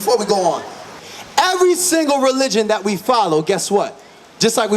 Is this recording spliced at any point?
yes; 1 cut; at 0.9 s

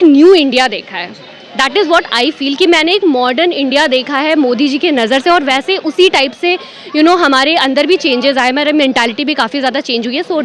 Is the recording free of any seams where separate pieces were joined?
yes; 0 cuts

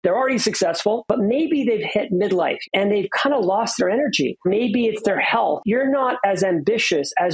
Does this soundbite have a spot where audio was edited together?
yes; 4 cuts; at 1.0 s, 2.6 s, 4.4 s, 5.6 s

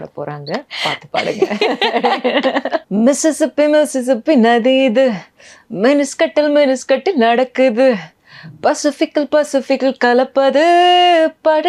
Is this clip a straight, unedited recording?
no; 1 cut; at 2.8 s

